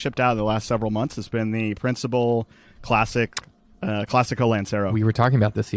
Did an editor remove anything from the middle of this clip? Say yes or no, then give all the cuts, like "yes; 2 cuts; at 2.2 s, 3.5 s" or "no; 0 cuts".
no; 0 cuts